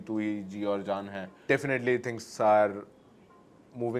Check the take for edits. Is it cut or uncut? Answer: cut